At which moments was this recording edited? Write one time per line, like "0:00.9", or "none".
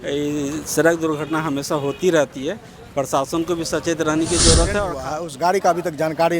0:04.9